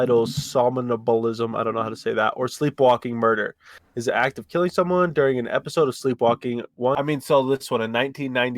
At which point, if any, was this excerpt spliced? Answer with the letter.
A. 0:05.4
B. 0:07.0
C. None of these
B